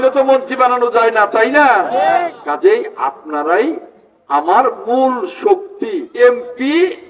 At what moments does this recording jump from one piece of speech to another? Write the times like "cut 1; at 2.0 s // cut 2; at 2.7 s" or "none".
cut 1; at 6.1 s